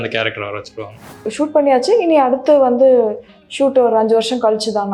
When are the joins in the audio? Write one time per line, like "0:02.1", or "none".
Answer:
0:01.1